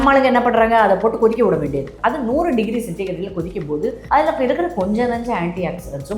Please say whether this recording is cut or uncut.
cut